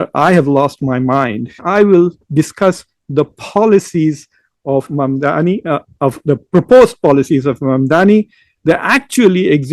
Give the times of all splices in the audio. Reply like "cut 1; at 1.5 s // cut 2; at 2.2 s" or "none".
cut 1; at 1.6 s